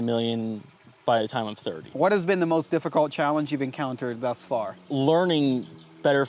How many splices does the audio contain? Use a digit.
2